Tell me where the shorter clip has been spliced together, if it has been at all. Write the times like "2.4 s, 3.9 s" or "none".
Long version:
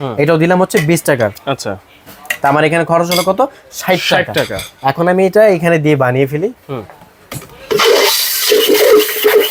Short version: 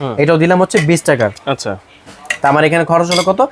none